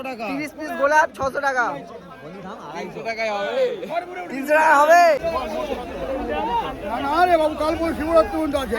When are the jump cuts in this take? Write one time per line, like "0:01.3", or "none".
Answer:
0:05.2